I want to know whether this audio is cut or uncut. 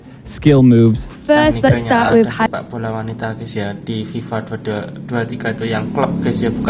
uncut